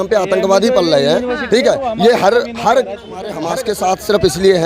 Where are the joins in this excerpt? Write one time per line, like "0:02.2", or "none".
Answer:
0:03.3